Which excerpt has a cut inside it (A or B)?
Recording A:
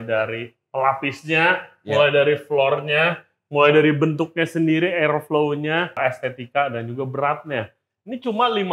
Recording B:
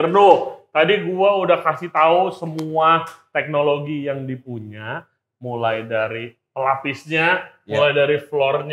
A